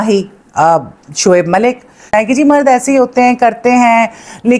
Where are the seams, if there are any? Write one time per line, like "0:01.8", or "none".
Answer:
0:02.1